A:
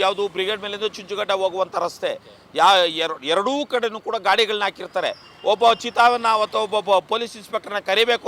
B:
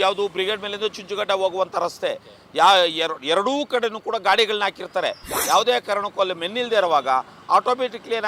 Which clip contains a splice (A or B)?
B